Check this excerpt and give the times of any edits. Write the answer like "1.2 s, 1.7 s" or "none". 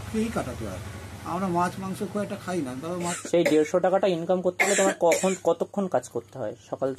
3.2 s